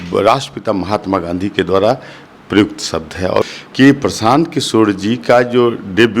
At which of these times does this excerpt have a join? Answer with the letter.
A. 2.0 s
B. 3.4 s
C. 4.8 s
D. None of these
B